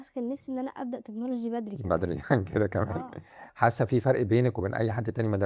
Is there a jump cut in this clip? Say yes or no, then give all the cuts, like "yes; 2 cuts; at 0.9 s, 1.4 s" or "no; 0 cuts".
no; 0 cuts